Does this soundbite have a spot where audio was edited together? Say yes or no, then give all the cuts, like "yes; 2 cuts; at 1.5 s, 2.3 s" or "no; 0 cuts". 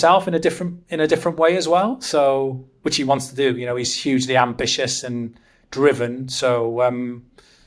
no; 0 cuts